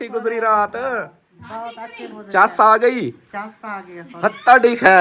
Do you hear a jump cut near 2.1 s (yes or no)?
no